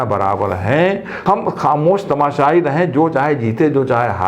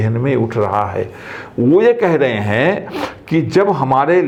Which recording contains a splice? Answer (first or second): first